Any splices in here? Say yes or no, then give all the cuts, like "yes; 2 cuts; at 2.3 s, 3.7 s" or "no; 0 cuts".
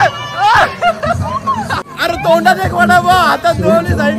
yes; 1 cut; at 1.9 s